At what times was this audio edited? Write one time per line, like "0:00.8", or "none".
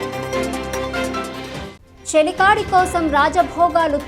none